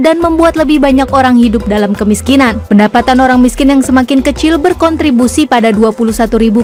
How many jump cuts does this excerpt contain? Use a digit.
0